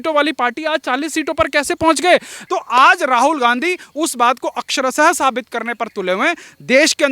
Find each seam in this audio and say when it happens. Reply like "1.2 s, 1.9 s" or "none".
2.4 s